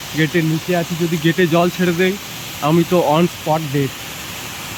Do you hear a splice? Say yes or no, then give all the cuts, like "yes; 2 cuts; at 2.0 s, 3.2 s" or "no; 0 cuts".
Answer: no; 0 cuts